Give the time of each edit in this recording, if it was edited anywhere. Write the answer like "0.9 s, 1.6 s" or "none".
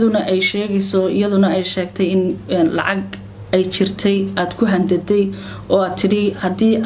none